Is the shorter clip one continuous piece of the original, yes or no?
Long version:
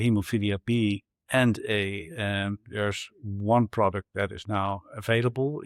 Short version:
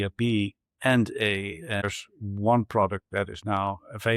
no